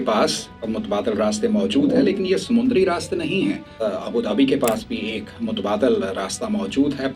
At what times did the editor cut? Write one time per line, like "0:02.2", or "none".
0:03.8